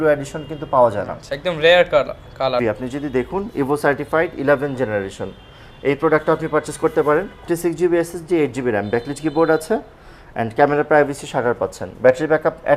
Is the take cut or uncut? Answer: cut